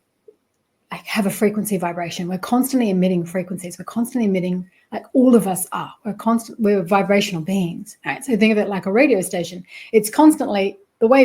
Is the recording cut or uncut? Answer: uncut